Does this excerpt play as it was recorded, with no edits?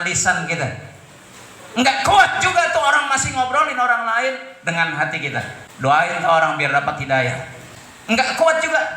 no; 1 cut; at 5.6 s

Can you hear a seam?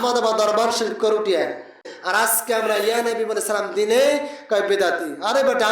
yes; 1 cut; at 1.9 s

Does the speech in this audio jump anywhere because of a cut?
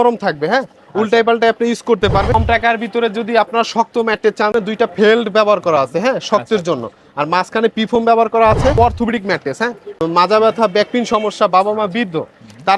yes; 4 cuts; at 2.3 s, 4.5 s, 8.7 s, 9.8 s

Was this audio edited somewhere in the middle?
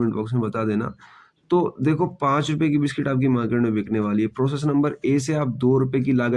no; 0 cuts

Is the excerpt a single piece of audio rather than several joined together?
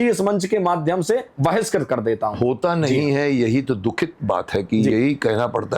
yes; 0 cuts

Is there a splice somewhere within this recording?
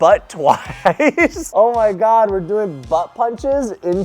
yes; 1 cut; at 1.5 s

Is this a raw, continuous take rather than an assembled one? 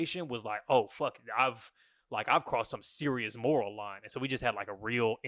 yes; 0 cuts

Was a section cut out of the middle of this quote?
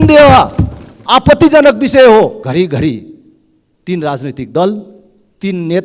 yes; 1 cut; at 2.4 s

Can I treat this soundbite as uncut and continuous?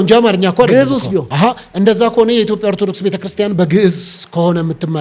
no; 1 cut; at 1.3 s

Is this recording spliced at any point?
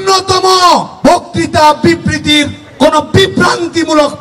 yes; 2 cuts; at 0.9 s, 2.6 s

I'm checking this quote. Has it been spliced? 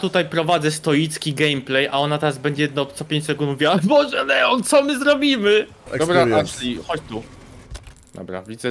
yes; 1 cut; at 5.9 s

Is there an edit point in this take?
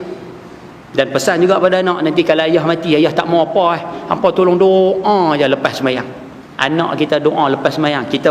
no; 0 cuts

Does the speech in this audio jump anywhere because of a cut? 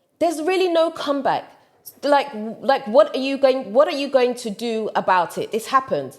no; 0 cuts

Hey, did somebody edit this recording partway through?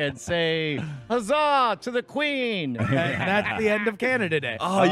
yes; 1 cut; at 2.8 s

